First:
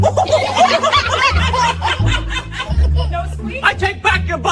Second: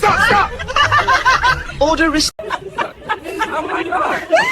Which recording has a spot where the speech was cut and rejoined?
second; 1 cut; at 2.4 s

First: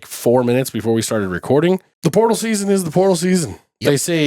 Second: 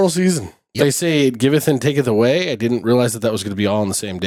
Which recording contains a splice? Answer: first; 1 cut; at 1.9 s

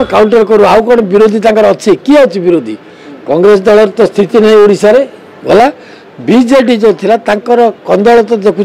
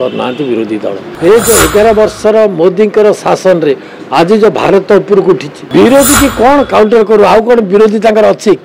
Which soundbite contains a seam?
second; 2 cuts; at 1.0 s, 5.6 s

